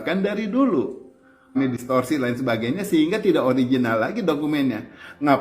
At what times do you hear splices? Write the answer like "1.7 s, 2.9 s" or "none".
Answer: 1.6 s